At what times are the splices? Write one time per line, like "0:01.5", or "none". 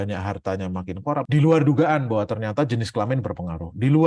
0:01.3